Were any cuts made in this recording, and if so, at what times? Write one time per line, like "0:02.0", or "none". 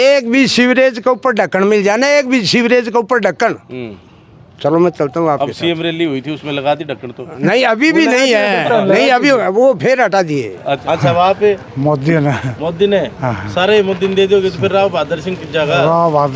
0:10.8